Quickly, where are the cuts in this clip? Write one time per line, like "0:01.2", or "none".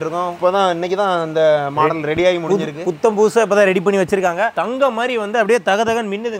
none